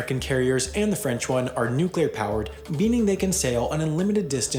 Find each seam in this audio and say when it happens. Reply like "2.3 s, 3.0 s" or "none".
none